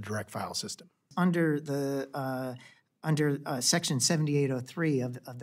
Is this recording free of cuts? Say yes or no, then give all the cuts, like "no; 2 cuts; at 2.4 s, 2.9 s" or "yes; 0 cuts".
no; 1 cut; at 1.1 s